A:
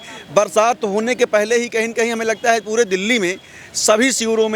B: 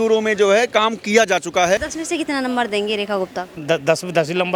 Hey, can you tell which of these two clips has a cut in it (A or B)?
B